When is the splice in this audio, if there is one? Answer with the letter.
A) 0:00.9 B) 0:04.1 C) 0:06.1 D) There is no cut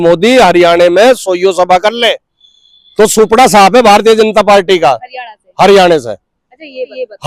D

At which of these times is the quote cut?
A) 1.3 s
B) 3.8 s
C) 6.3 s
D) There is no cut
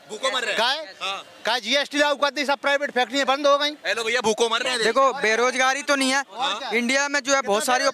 D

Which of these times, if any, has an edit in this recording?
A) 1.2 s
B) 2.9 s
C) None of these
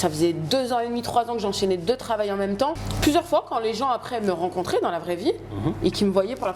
B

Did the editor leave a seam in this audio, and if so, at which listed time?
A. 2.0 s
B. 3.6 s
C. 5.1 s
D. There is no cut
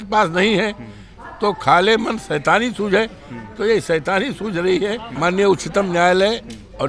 C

